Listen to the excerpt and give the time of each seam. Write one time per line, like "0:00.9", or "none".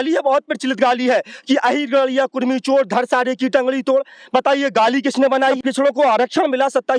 0:05.5